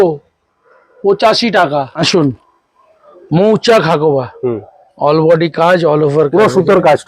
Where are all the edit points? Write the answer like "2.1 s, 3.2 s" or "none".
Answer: 1.9 s